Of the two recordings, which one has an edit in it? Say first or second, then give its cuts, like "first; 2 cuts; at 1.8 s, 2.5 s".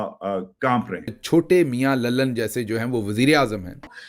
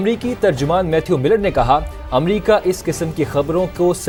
first; 1 cut; at 1.2 s